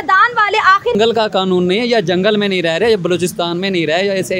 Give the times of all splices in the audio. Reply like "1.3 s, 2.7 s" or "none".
0.9 s